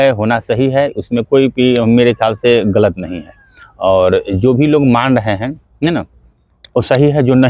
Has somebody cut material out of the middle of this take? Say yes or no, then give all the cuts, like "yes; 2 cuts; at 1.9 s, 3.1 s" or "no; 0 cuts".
no; 0 cuts